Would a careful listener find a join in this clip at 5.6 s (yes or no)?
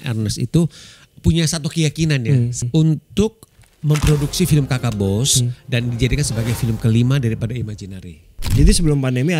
no